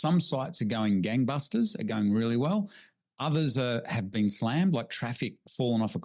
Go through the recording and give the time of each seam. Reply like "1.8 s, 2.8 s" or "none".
none